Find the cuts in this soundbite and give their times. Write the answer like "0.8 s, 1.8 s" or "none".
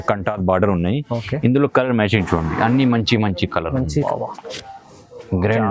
4.0 s